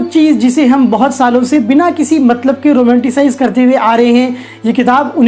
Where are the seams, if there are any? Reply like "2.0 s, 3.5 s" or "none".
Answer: none